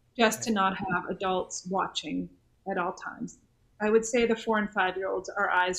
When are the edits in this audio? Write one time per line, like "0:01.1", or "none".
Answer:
0:02.5